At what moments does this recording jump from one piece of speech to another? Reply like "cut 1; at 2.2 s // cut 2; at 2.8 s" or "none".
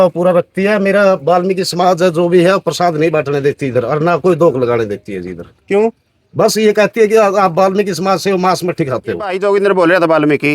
cut 1; at 9.3 s